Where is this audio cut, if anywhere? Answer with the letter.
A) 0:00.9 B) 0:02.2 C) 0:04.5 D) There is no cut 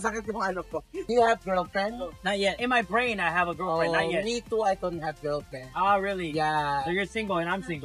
A